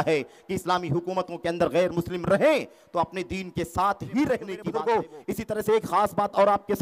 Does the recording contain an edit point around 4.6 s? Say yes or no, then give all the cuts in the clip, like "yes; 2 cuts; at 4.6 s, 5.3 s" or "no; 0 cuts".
yes; 1 cut; at 4.6 s